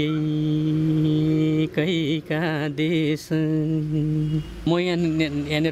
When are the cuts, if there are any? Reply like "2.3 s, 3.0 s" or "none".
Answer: 4.7 s